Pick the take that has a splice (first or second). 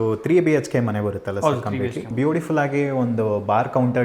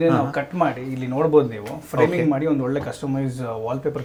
first